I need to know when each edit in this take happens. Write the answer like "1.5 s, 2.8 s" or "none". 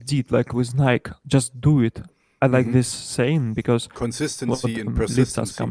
3.9 s